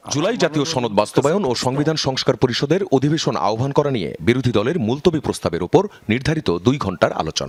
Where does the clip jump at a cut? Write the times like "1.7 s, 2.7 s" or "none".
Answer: none